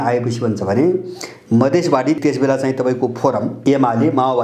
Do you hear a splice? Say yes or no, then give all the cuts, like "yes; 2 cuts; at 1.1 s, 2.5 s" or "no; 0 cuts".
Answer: yes; 2 cuts; at 2.2 s, 3.6 s